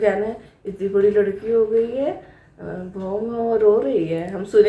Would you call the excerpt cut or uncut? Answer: uncut